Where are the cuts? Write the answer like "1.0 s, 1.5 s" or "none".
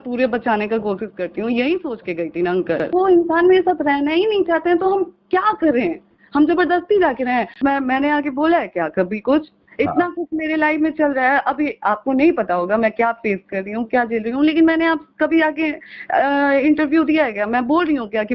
2.9 s, 7.5 s